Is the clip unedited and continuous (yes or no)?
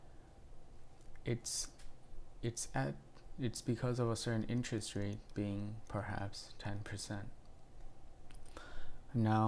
yes